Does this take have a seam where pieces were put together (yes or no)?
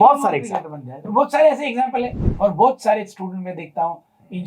yes